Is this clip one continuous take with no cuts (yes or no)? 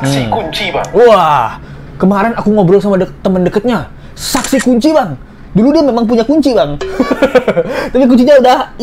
yes